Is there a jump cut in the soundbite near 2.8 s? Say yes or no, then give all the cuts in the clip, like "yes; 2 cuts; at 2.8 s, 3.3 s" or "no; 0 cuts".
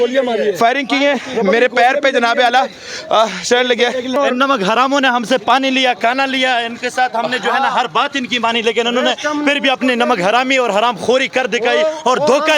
no; 1 cut; at 4.1 s